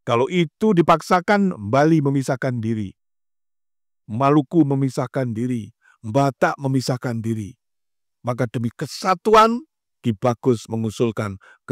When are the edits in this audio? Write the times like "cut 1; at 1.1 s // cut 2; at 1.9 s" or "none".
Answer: none